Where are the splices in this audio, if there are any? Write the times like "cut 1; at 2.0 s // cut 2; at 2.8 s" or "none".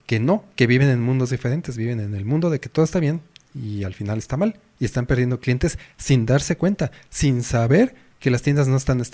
none